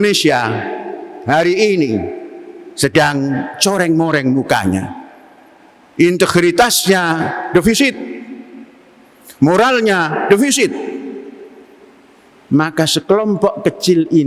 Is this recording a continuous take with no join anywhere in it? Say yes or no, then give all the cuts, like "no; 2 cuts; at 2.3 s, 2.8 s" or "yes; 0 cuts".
yes; 0 cuts